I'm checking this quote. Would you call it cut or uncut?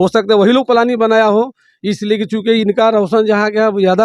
uncut